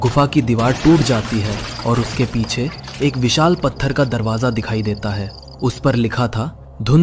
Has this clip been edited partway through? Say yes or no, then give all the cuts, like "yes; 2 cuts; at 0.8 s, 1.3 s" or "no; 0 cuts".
no; 0 cuts